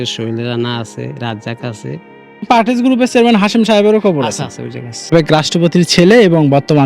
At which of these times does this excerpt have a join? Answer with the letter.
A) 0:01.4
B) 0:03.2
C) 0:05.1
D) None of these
C